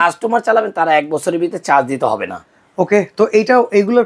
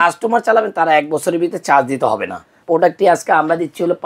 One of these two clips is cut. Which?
second; 1 cut; at 2.6 s

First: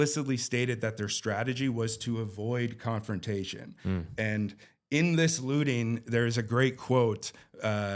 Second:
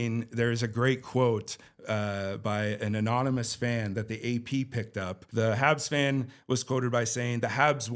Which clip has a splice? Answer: second; 1 cut; at 5.2 s

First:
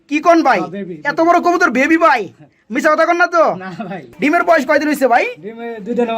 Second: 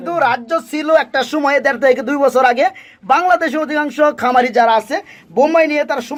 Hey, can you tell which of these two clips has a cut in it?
first; 1 cut; at 4.0 s

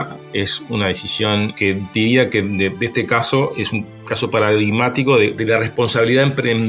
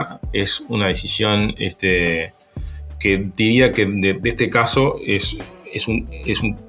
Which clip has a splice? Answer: first; 3 cuts; at 1.5 s, 3.5 s, 5.4 s

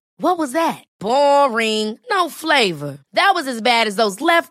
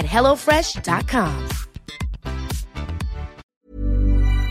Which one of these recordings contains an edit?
second; 1 cut; at 3.5 s

